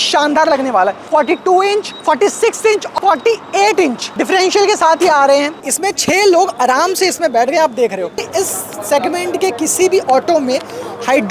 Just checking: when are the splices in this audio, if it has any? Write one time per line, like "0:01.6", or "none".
0:01.1
0:01.9
0:02.9
0:04.1
0:05.6
0:08.3